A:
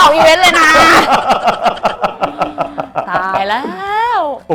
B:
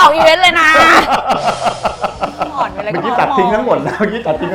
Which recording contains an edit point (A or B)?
B